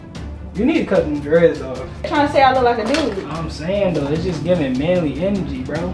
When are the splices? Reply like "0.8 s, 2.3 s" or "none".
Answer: 2.1 s

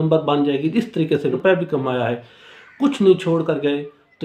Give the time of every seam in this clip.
1.4 s

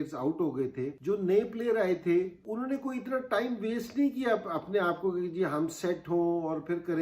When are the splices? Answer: 1.0 s, 2.4 s

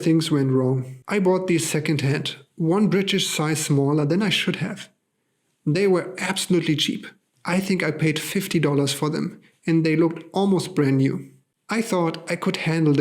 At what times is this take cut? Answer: 0.9 s

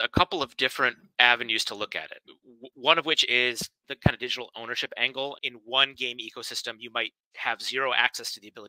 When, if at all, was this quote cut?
2.2 s, 5.4 s

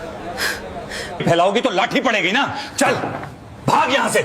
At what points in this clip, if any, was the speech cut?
1.2 s

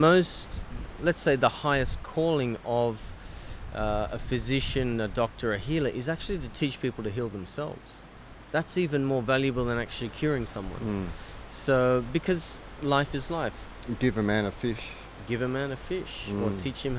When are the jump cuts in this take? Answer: none

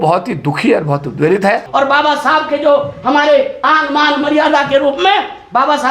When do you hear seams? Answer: 1.6 s

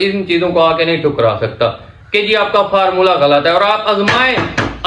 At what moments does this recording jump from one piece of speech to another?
none

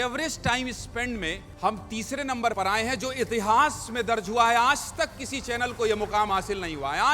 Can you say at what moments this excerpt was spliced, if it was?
1.5 s, 2.5 s

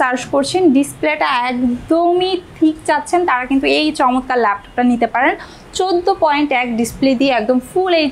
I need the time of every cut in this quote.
none

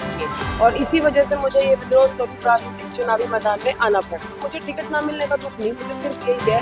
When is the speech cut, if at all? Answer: 4.4 s

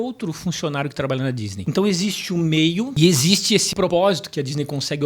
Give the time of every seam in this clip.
1.6 s, 2.9 s, 3.8 s

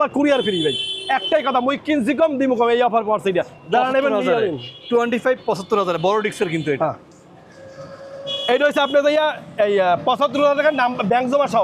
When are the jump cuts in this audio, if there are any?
none

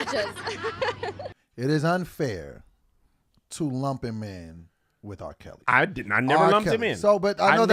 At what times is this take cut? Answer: 1.3 s

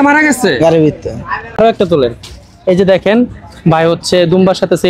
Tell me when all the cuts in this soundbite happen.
1.6 s

